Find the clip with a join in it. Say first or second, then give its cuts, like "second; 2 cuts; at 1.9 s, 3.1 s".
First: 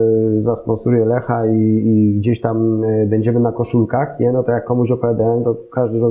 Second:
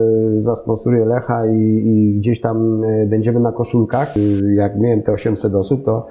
second; 1 cut; at 4.1 s